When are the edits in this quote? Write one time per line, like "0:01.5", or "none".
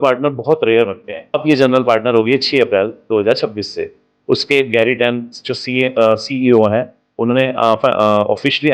0:01.4